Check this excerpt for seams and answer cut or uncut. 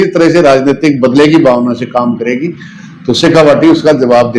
uncut